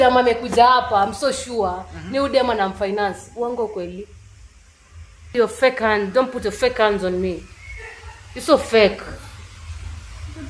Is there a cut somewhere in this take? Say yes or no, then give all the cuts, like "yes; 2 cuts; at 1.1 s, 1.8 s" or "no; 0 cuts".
yes; 1 cut; at 5.3 s